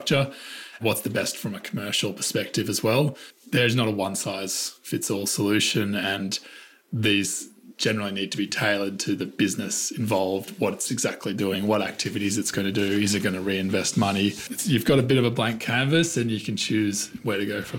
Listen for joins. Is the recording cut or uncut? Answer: cut